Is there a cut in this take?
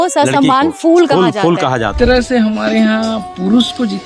yes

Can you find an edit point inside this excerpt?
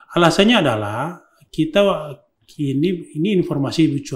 no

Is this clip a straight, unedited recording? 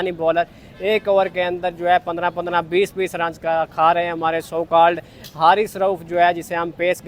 yes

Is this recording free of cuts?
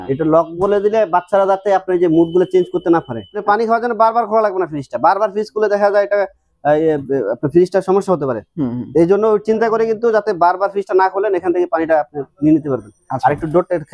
no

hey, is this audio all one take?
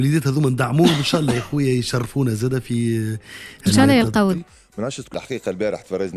no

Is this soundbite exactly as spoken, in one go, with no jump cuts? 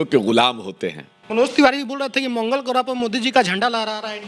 no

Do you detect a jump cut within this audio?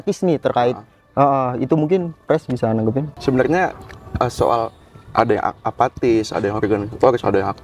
no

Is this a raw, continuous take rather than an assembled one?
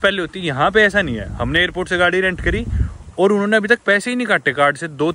yes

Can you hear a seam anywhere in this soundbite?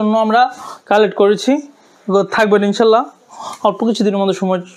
no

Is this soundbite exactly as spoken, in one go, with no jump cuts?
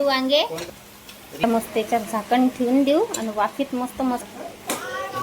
no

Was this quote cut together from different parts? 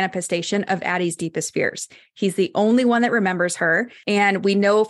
yes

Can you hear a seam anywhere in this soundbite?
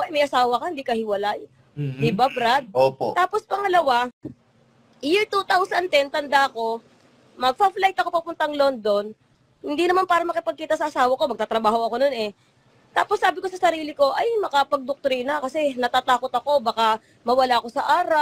no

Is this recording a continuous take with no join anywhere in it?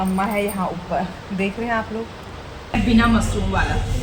no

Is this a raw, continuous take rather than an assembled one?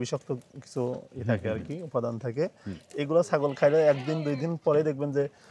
yes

